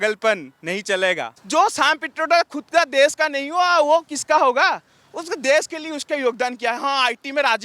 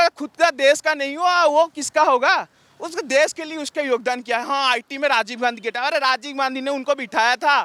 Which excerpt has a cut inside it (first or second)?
first